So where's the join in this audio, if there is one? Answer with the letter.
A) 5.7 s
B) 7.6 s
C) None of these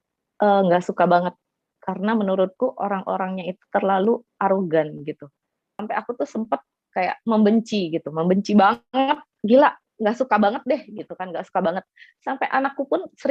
A